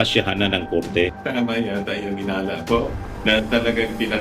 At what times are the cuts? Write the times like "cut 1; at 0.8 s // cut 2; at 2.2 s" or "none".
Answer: cut 1; at 1.2 s